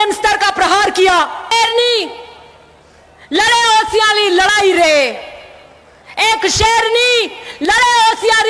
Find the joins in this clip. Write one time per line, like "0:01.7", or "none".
0:01.5